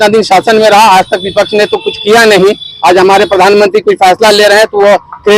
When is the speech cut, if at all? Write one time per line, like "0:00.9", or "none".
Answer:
none